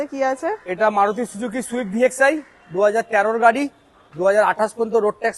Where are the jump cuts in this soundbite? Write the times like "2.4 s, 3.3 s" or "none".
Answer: none